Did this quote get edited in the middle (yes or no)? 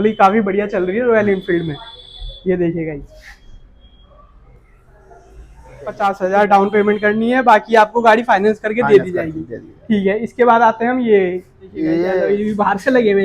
yes